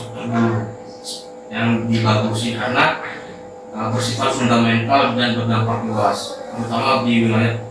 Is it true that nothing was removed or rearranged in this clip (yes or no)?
yes